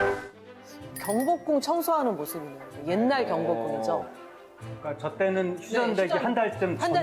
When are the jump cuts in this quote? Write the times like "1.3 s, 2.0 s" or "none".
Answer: none